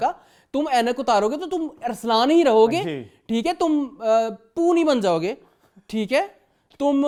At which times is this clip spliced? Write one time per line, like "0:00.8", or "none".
none

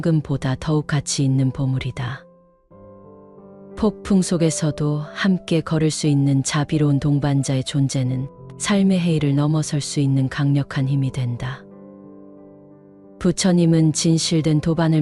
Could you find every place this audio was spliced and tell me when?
none

